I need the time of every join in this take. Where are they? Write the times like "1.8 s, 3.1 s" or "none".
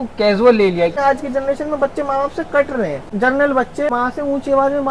1.0 s, 3.0 s, 3.9 s